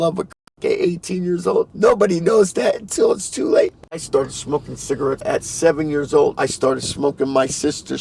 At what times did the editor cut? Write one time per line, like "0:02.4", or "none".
0:01.7
0:04.0
0:05.2
0:06.4